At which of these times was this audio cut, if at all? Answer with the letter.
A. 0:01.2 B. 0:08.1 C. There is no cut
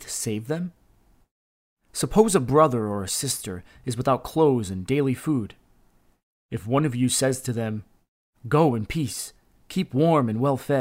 A